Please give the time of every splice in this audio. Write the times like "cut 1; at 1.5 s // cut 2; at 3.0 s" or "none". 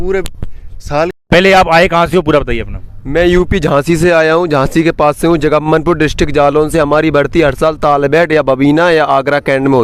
cut 1; at 1.2 s

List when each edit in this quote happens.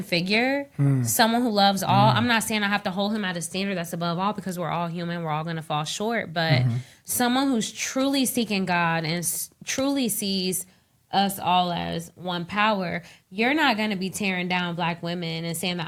none

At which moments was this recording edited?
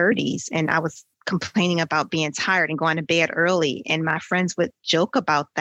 none

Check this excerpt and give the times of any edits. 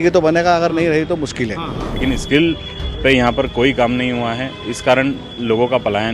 cut 1; at 2.0 s

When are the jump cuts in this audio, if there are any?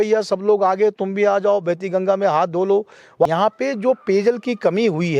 cut 1; at 3.3 s

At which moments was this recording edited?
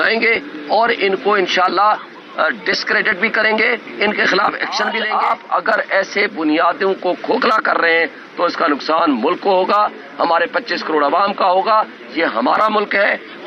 cut 1; at 4.8 s

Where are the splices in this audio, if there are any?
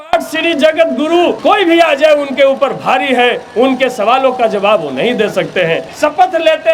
cut 1; at 1.4 s // cut 2; at 5.9 s

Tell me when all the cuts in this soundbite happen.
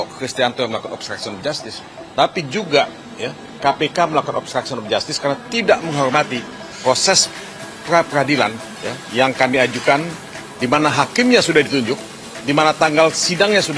none

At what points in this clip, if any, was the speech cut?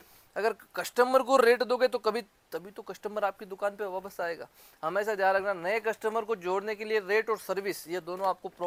none

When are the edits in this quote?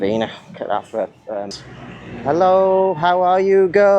cut 1; at 1.6 s

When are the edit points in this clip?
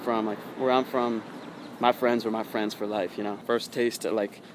cut 1; at 3.4 s

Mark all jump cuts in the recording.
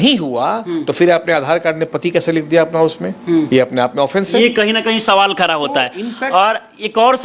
none

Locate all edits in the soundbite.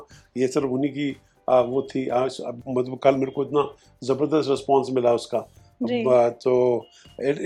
none

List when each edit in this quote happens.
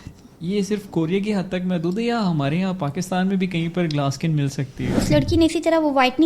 cut 1; at 4.9 s

